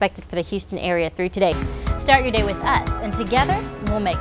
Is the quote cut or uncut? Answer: cut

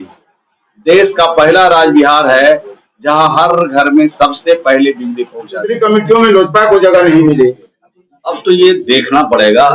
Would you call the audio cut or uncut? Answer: cut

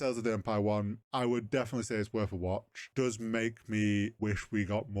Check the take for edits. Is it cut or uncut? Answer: cut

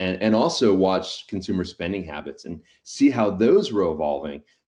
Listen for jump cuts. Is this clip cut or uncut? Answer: uncut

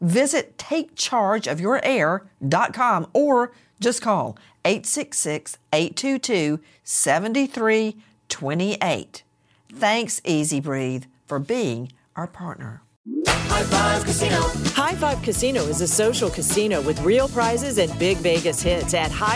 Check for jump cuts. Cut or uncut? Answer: uncut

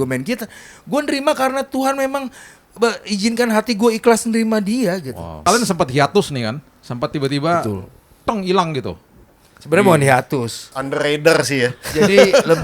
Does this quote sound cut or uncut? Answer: cut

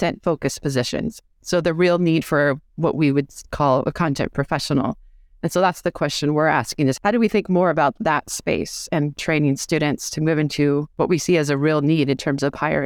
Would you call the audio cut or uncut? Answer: cut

